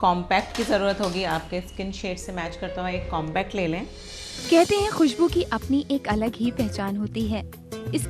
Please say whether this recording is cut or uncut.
cut